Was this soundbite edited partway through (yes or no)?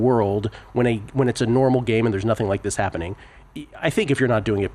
no